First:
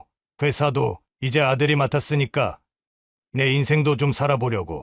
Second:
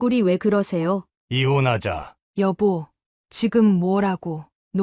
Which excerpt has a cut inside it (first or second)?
second